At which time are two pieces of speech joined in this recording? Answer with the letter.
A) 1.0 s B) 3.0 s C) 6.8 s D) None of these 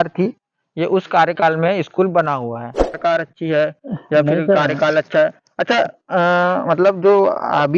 B